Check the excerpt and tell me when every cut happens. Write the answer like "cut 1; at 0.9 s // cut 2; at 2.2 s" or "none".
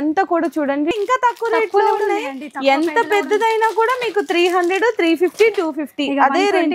cut 1; at 0.9 s